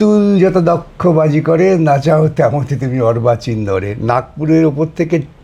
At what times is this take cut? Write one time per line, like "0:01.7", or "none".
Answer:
none